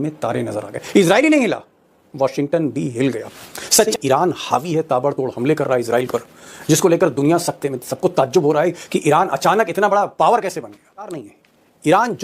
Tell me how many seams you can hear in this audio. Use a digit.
2